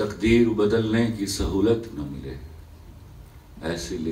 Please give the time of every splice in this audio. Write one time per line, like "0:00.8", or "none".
none